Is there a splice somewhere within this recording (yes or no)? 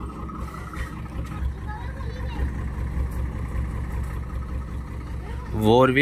yes